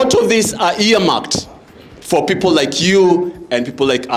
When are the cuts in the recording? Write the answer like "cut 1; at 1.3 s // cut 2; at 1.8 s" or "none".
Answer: none